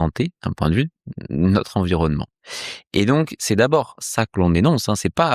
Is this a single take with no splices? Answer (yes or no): yes